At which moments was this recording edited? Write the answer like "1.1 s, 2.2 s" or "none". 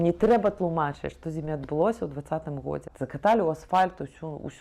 2.9 s

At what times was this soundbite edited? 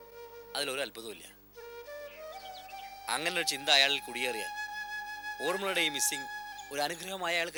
none

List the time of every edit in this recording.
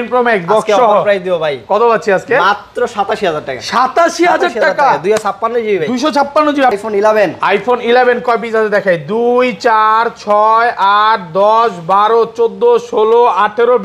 6.7 s

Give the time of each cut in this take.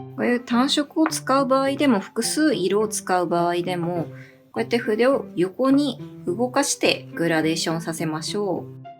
none

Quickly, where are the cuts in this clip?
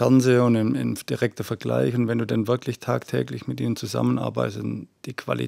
none

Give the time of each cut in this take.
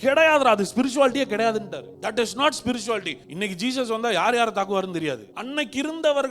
1.8 s, 3.2 s, 5.3 s

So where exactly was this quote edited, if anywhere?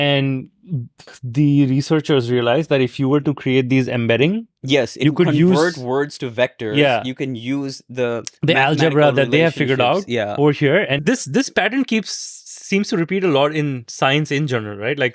1.1 s

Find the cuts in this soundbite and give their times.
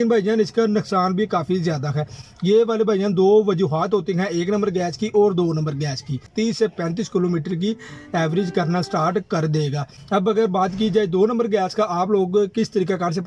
2.2 s, 6.3 s, 9.9 s

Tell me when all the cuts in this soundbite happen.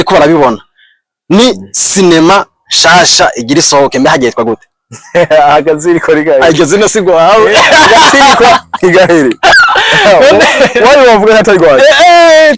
none

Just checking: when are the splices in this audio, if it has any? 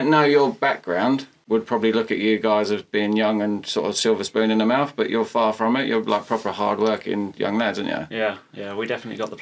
1.4 s

